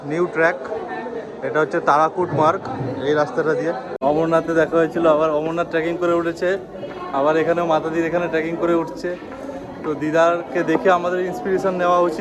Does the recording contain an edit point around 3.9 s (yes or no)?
yes